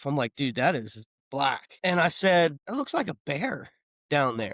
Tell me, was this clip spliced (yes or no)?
yes